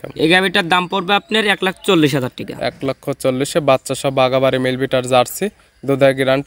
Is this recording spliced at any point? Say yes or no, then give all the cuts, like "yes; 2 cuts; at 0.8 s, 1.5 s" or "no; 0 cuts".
no; 0 cuts